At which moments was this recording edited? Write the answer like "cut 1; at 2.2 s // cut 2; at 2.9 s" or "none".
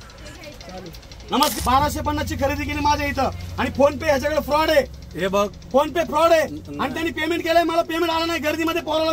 cut 1; at 1.5 s